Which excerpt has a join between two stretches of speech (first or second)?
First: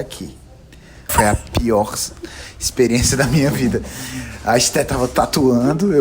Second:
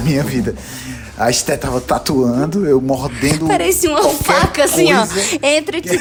first